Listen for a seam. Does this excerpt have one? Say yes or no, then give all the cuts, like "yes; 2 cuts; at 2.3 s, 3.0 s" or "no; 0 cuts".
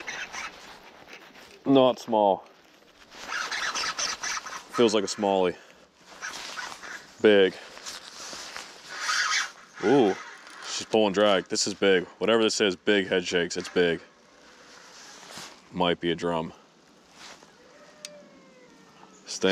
no; 0 cuts